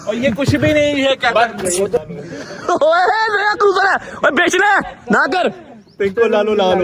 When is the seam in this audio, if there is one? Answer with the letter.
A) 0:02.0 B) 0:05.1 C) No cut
A